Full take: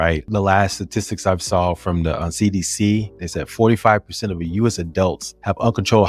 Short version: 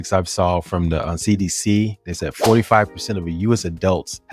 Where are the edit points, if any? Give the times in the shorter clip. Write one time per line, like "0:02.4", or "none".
none

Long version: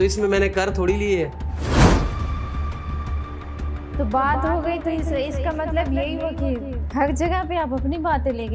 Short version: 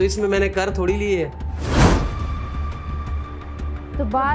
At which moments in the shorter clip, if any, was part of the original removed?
none

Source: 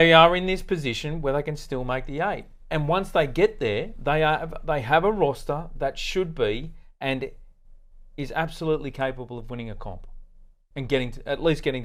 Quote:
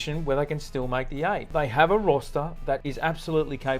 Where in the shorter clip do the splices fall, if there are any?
0:01.5
0:02.9

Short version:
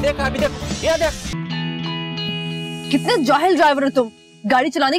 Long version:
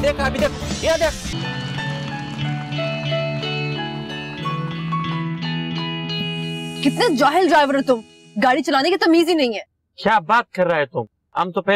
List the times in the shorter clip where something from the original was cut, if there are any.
0:01.3

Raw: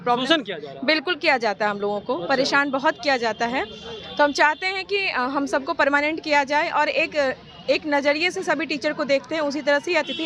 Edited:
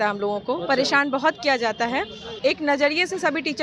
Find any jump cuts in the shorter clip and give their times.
0:02.2

